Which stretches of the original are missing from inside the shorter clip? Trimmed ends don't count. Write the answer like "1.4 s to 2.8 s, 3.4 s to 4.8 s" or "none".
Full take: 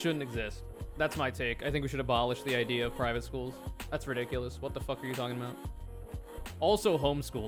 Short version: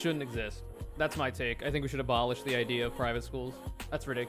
none